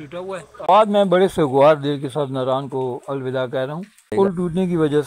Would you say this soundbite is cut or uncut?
cut